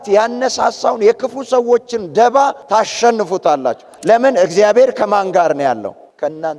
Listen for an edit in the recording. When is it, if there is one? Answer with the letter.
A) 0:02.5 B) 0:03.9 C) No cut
B